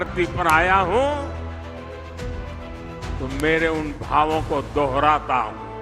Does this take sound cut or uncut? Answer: cut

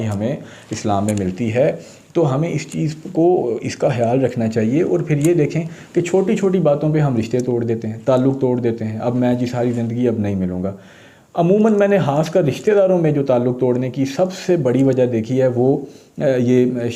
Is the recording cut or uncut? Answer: uncut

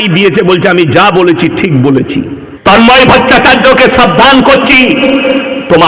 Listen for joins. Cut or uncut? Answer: cut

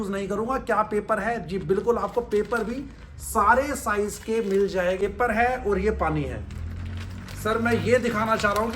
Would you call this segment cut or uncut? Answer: cut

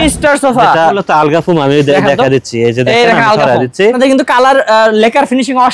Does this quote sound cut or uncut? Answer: cut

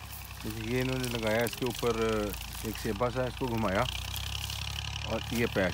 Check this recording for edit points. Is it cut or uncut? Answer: uncut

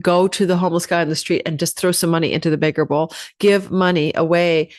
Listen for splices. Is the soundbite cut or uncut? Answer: uncut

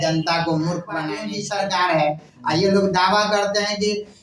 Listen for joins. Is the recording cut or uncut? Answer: cut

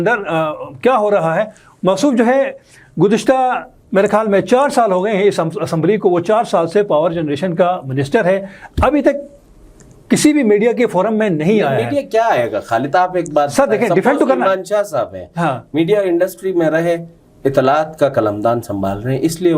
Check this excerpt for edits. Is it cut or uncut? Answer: uncut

